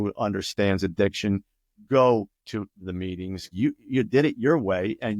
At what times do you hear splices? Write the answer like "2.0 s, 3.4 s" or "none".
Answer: 3.5 s